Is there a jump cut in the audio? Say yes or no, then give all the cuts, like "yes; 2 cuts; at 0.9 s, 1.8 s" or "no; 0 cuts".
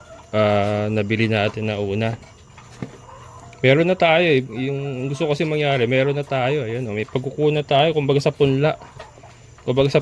no; 0 cuts